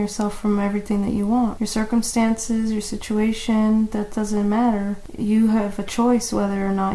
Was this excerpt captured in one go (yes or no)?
no